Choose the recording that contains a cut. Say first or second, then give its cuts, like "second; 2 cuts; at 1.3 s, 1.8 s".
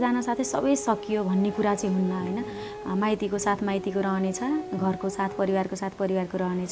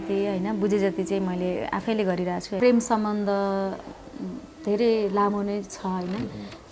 second; 1 cut; at 2.5 s